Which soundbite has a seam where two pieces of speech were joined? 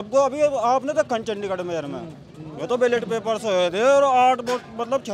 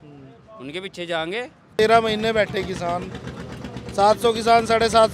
second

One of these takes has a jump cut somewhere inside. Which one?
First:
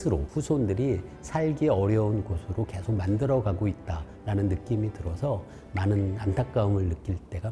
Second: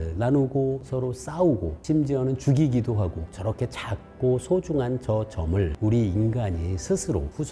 second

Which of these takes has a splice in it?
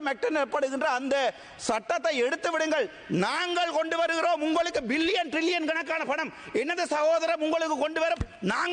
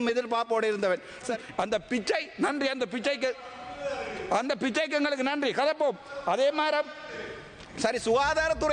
second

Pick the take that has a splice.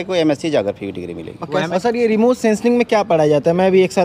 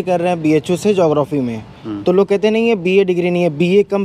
first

